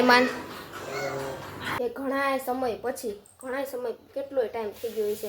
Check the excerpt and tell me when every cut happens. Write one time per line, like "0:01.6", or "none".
0:01.8